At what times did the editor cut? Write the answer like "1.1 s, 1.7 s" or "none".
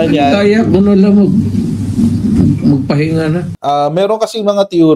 3.5 s